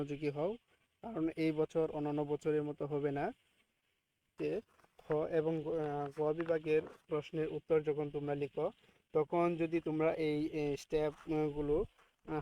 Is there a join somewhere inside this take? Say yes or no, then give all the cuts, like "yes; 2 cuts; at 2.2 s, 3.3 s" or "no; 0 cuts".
yes; 1 cut; at 4.3 s